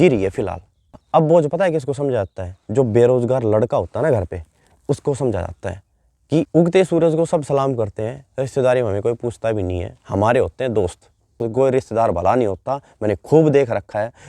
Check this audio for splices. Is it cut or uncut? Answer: cut